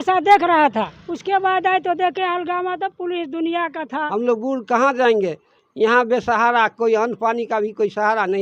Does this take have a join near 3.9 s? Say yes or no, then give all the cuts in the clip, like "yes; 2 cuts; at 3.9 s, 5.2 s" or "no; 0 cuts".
yes; 2 cuts; at 0.9 s, 3.9 s